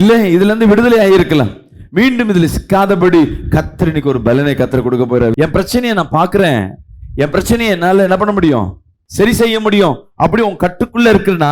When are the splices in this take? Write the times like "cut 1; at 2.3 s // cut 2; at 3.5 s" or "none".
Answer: cut 1; at 5.4 s

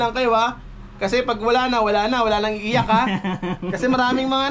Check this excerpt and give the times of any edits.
none

